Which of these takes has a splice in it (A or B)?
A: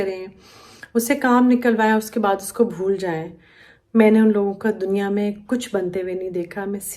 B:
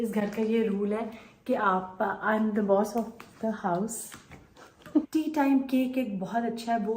B